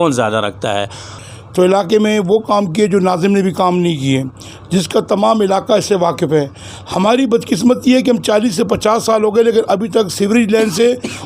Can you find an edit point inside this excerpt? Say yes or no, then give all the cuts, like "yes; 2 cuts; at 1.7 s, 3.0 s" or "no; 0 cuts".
yes; 1 cut; at 1.1 s